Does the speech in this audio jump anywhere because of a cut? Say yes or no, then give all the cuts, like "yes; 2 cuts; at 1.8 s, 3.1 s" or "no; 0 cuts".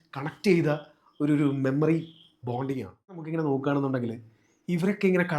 yes; 1 cut; at 3.3 s